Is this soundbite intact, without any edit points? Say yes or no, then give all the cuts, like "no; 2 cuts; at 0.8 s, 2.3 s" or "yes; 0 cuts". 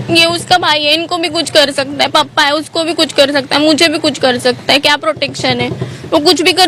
yes; 0 cuts